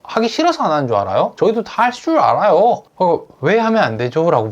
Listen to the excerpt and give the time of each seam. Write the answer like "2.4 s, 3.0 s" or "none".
1.3 s, 2.9 s

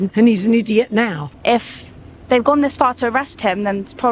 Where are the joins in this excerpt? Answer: 1.2 s

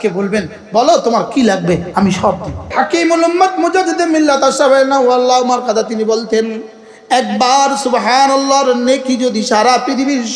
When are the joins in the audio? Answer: 2.7 s

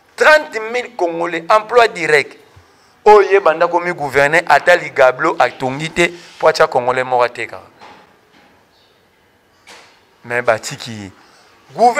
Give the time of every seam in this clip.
none

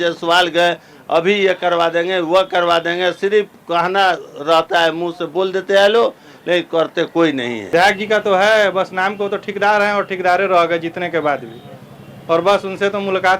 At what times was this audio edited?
7.7 s

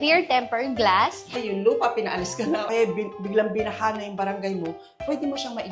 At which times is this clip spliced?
1.3 s, 2.7 s

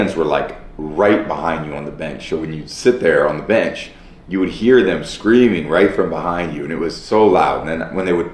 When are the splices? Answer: none

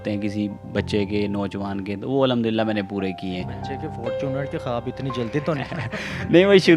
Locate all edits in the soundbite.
none

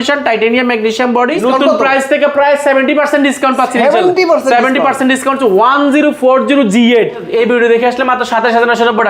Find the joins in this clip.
1.4 s, 7.3 s

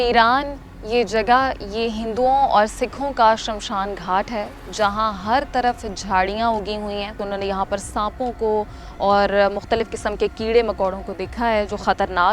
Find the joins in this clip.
7.2 s

